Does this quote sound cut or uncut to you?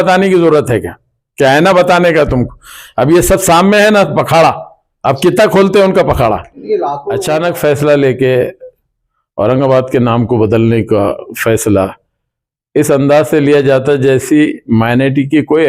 cut